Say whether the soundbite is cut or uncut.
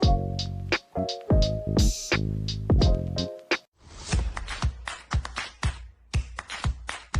cut